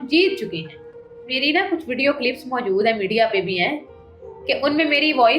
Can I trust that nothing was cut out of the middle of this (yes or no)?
yes